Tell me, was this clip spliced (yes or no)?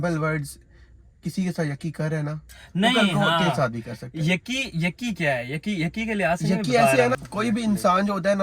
yes